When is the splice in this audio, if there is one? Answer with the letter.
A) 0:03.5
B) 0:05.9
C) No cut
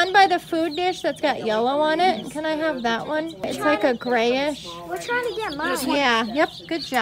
A